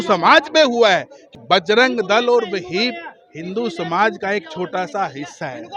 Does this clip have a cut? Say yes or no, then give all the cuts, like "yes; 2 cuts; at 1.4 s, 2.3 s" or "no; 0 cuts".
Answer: yes; 1 cut; at 1.2 s